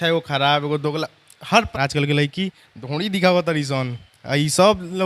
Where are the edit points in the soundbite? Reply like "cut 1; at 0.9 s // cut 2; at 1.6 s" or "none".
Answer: cut 1; at 1.5 s